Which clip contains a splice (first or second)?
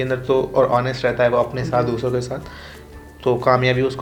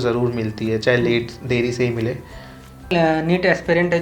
second